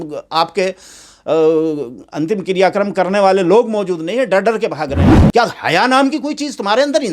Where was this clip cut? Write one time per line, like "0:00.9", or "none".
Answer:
0:05.2